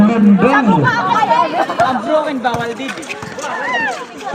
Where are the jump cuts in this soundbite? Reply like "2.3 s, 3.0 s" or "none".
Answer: none